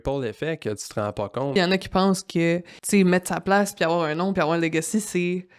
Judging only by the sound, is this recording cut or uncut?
cut